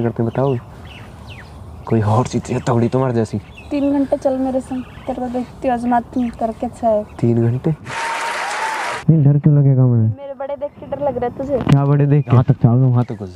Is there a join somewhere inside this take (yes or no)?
yes